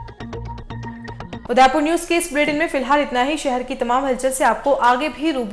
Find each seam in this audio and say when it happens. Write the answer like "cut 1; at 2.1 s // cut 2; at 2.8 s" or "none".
none